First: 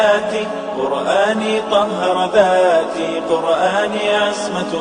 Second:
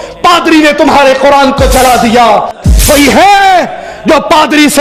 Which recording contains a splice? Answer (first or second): second